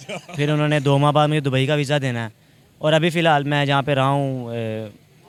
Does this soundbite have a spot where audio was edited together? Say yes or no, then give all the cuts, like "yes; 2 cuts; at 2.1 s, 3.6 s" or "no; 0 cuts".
no; 0 cuts